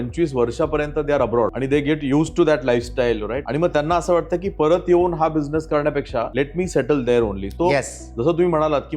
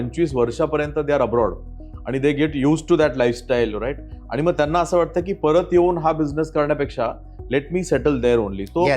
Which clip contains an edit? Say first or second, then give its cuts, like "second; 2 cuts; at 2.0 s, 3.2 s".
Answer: first; 3 cuts; at 1.6 s, 3.4 s, 6.3 s